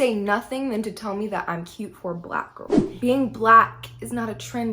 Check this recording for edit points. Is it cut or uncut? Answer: cut